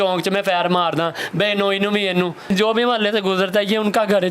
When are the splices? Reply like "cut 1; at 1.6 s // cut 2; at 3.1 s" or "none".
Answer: cut 1; at 2.5 s